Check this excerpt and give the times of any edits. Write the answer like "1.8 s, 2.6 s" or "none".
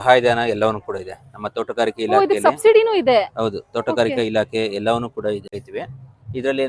5.6 s